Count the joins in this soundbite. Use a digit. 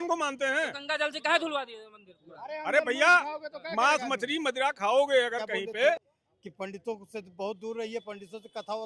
1